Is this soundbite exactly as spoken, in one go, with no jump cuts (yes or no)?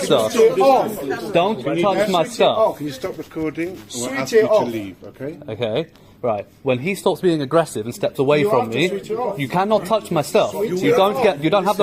yes